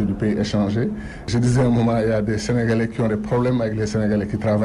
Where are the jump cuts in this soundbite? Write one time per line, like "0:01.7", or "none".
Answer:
0:01.1